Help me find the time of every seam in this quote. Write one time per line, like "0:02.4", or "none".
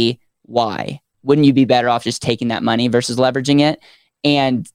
0:01.1